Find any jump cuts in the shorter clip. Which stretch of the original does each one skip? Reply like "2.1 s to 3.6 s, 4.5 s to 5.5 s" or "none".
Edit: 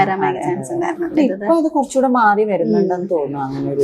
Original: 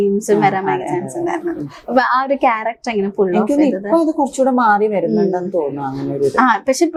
1.6 s to 3.6 s